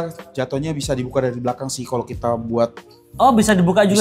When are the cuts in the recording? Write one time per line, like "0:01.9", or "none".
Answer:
none

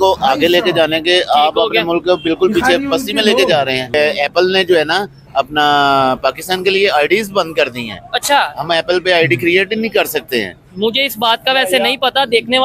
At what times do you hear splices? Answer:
0:03.9

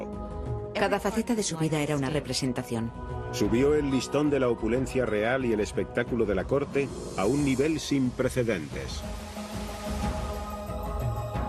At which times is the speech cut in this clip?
none

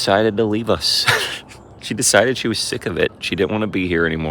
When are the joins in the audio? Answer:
none

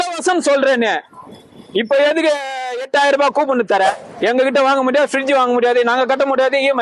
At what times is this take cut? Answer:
0:04.1

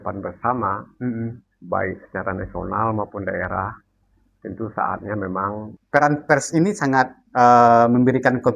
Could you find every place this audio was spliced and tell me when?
0:05.7

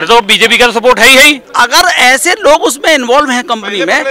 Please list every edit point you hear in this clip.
0:01.4

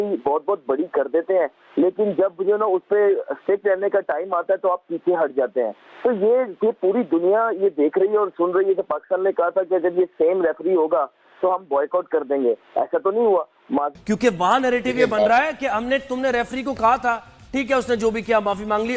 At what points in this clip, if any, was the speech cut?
0:13.9

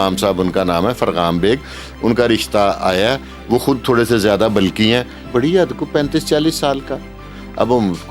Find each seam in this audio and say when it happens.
0:05.2

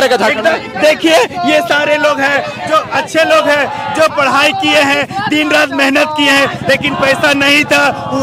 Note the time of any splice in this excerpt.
none

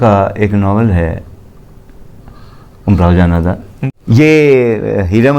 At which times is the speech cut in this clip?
0:03.7

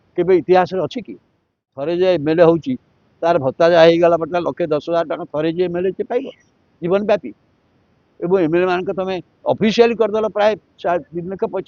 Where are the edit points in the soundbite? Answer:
0:01.8

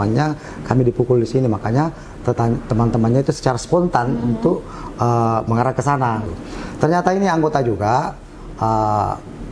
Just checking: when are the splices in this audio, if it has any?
0:06.4

